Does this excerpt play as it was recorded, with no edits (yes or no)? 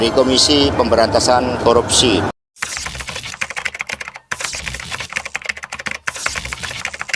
yes